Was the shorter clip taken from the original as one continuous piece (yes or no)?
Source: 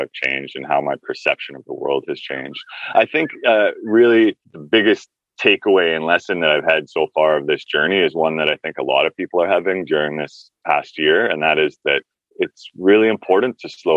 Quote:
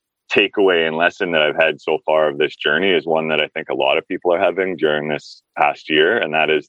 yes